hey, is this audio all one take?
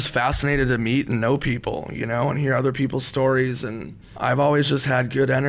no; 1 cut; at 4.1 s

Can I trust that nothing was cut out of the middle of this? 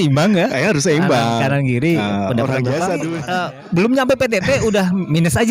no; 1 cut; at 3.2 s

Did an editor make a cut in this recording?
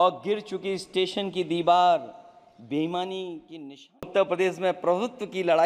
yes; 1 cut; at 4.1 s

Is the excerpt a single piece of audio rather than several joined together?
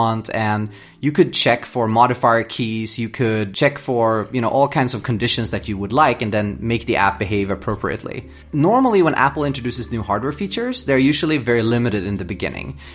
no; 1 cut; at 8.4 s

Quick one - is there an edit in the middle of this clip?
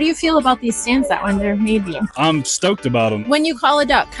no; 0 cuts

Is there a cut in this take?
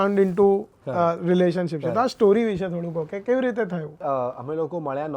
yes; 1 cut; at 4.0 s

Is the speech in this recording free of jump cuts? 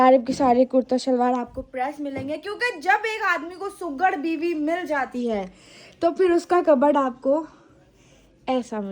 yes; 0 cuts

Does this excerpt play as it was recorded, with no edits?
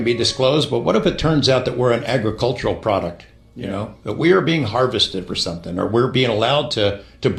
yes; 0 cuts

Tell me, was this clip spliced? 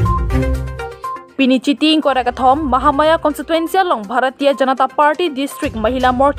no; 0 cuts

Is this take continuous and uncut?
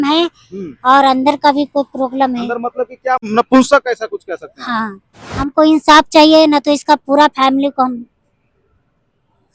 no; 2 cuts; at 3.3 s, 5.2 s

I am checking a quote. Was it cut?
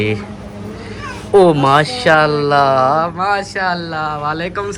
no; 0 cuts

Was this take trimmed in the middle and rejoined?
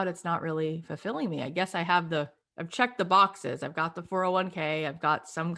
no; 0 cuts

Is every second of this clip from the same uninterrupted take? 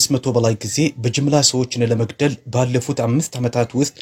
yes; 0 cuts

